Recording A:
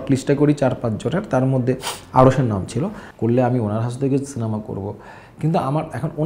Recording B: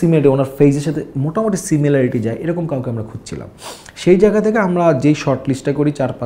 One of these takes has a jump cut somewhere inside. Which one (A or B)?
A